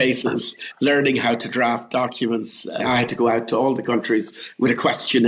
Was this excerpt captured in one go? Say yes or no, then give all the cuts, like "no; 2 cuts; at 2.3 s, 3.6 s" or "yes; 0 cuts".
no; 1 cut; at 2.8 s